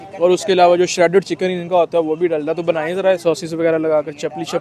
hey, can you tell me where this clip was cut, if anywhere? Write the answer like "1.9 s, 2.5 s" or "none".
3.2 s